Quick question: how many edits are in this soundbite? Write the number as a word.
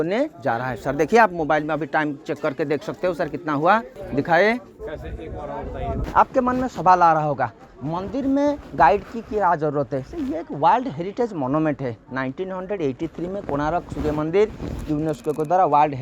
two